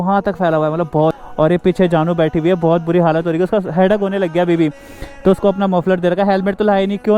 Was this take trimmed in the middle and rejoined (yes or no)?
yes